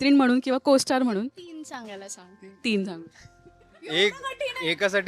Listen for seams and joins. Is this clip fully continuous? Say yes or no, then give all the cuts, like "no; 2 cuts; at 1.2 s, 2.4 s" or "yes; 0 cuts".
yes; 0 cuts